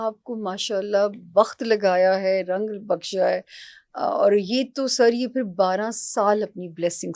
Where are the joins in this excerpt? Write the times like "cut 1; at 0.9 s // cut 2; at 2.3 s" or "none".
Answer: none